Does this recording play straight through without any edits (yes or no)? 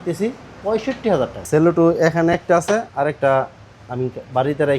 no